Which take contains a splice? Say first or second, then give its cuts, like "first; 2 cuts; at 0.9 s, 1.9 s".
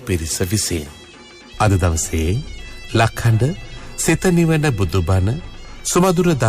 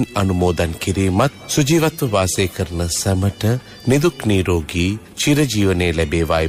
first; 1 cut; at 1.4 s